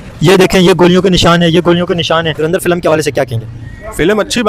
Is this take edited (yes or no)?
yes